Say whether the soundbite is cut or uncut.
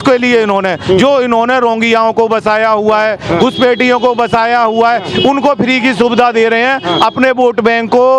uncut